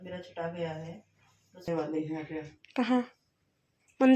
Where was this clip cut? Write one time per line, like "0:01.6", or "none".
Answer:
0:01.7